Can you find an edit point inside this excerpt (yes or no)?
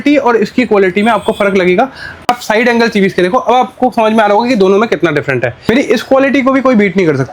yes